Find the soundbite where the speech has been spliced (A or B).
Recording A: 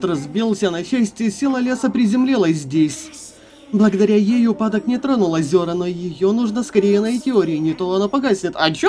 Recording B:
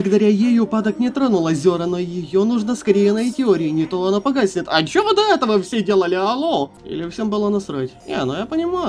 B